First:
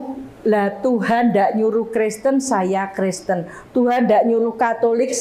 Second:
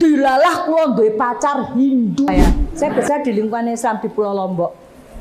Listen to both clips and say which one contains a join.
second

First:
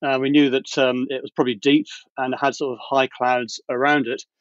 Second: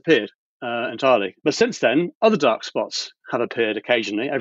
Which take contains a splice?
second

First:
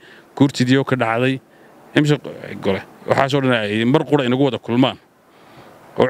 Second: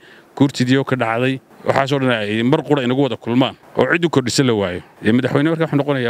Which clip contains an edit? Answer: second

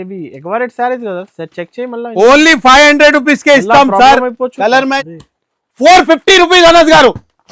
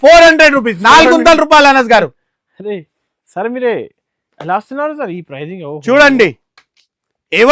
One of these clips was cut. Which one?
first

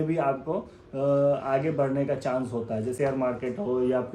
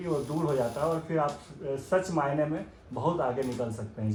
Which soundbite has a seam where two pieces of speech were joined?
first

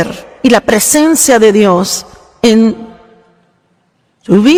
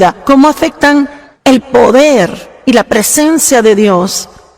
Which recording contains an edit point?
second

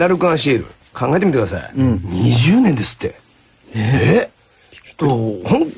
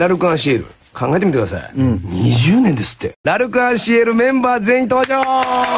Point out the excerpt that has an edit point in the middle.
first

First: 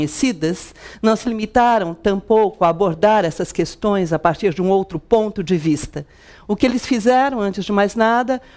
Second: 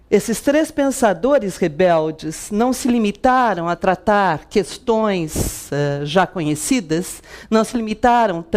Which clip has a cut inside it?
second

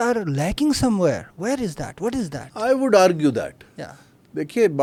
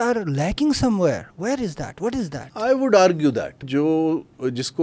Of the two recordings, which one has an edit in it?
second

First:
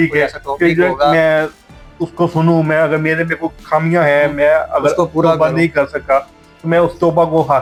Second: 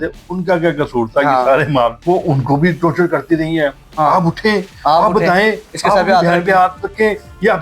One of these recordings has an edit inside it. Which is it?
second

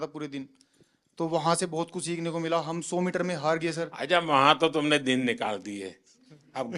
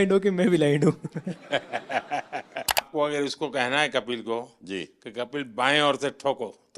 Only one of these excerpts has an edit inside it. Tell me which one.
second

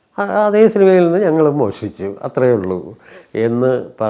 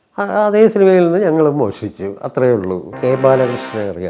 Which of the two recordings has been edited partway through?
second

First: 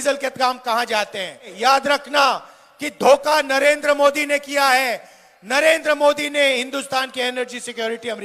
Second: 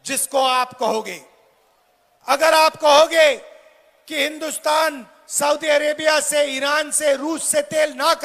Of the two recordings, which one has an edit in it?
first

